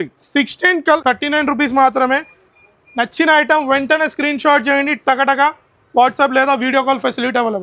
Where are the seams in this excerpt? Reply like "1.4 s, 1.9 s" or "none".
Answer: 1.0 s